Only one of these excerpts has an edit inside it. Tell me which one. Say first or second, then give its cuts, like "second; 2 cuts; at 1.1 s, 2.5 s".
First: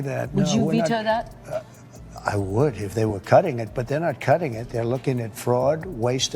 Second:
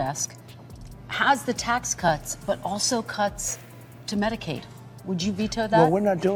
first; 1 cut; at 1.7 s